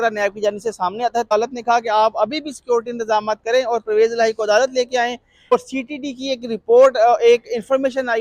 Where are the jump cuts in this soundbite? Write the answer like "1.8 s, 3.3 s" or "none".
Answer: 1.3 s, 5.5 s